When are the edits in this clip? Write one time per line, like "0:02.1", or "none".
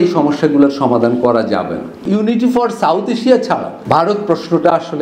0:02.1
0:03.7